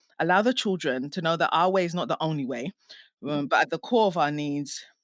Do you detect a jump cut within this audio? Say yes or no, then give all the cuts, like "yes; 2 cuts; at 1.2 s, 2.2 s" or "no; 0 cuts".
no; 0 cuts